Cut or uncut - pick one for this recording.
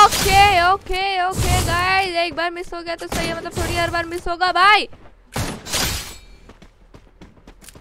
uncut